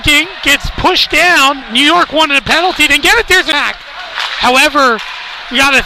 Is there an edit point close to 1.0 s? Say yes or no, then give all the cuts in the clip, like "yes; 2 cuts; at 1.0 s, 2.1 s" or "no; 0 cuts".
no; 1 cut; at 3.5 s